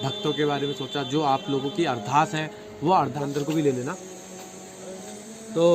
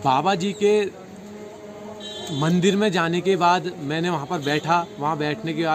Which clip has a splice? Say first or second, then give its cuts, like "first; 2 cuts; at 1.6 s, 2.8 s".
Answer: first; 1 cut; at 3.2 s